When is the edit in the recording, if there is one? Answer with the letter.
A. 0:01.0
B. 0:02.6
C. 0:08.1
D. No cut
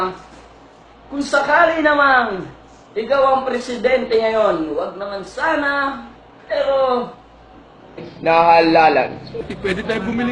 D